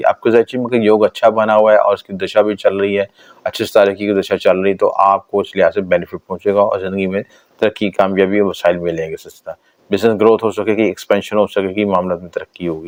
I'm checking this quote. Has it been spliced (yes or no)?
no